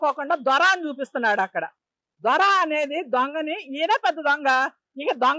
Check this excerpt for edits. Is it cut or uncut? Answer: uncut